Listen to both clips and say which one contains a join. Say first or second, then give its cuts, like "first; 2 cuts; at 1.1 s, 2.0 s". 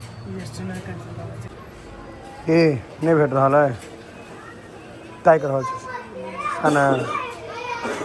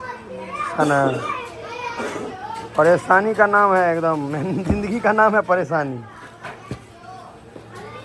first; 1 cut; at 1.6 s